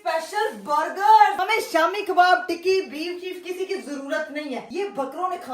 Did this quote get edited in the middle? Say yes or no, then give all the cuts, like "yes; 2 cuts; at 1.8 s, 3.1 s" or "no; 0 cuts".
yes; 1 cut; at 1.4 s